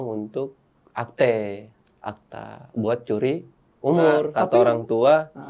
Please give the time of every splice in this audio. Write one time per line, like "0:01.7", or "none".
0:04.4